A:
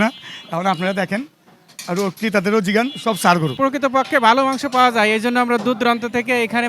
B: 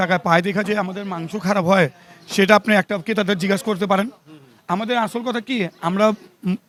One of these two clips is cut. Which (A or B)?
A